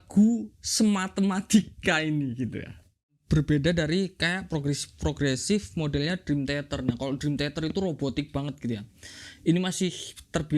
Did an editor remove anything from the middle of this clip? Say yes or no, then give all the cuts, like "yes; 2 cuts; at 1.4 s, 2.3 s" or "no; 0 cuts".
yes; 1 cut; at 3.2 s